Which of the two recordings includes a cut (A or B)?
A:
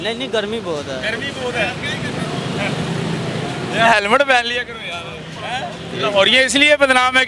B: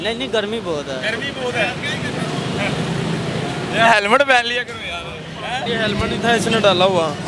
B